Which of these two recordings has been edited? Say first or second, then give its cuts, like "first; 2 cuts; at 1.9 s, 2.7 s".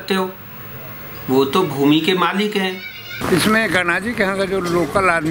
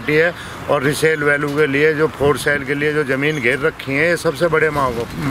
first; 1 cut; at 3.1 s